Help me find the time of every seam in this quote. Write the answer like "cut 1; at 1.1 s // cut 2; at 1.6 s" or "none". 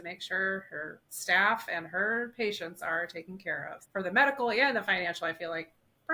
cut 1; at 3.8 s